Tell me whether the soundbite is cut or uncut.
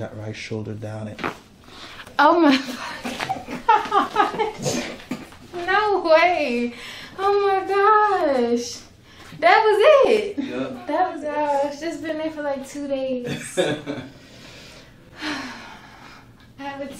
cut